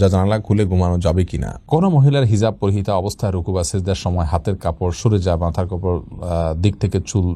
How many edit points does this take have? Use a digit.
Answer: 1